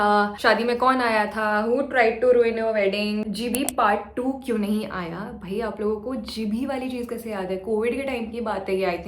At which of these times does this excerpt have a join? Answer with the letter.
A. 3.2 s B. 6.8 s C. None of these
A